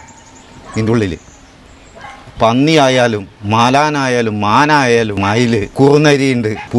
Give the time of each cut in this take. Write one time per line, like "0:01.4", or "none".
0:05.6